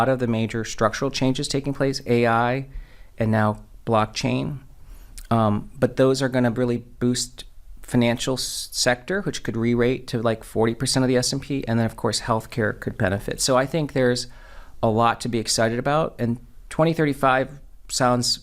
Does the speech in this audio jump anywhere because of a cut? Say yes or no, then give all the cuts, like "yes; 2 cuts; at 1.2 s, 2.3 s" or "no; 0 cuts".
no; 0 cuts